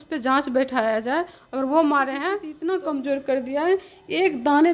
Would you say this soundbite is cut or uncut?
cut